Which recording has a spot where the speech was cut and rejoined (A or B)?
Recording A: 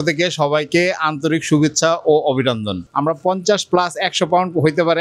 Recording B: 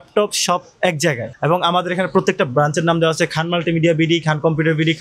A